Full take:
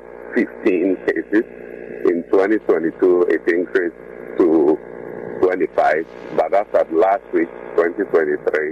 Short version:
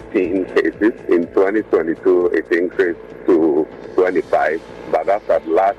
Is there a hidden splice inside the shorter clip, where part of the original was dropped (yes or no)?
yes